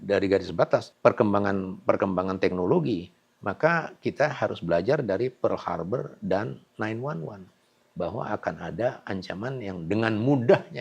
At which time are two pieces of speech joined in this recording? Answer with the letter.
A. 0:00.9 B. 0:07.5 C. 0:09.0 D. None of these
A